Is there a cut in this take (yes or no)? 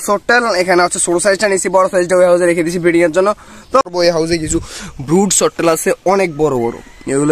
yes